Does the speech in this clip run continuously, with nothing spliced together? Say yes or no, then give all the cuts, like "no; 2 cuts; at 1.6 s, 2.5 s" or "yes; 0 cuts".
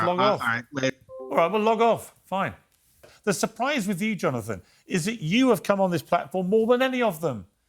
no; 1 cut; at 3.1 s